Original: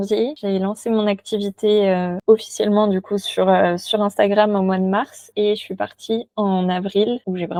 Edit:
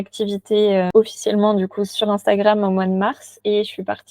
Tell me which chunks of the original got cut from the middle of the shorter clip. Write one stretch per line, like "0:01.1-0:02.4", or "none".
0:02.0-0:02.2
0:03.3-0:03.8